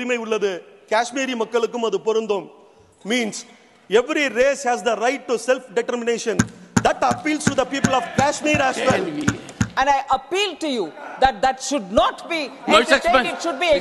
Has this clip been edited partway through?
yes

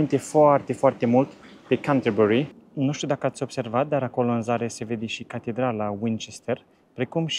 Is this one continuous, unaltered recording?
no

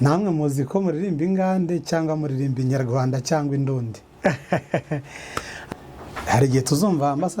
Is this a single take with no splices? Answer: no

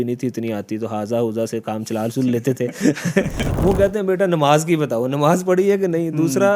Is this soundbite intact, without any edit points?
no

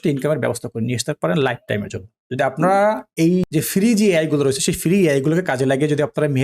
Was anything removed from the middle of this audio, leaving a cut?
no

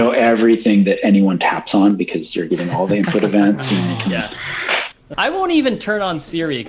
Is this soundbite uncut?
no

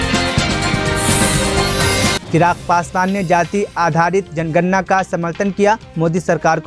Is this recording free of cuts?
no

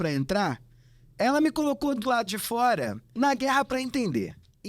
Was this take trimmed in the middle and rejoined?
yes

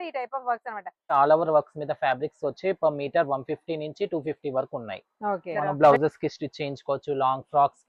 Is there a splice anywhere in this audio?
yes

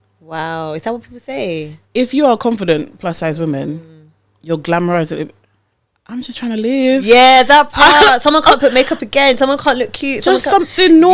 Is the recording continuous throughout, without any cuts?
yes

